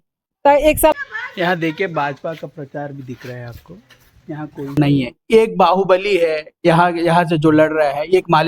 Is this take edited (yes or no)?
yes